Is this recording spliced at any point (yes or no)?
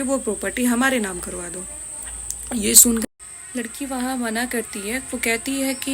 yes